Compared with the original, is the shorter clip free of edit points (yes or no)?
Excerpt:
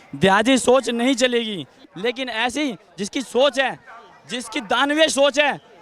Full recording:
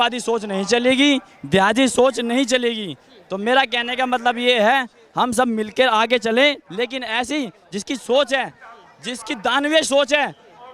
no